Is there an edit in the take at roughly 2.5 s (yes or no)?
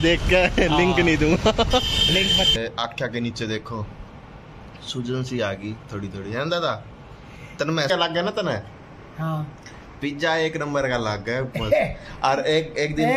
yes